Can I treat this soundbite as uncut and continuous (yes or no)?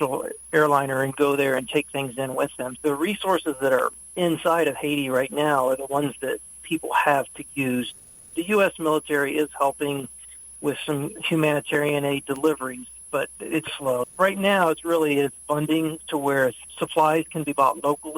no